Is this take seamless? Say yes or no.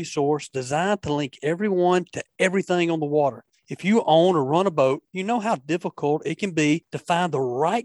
no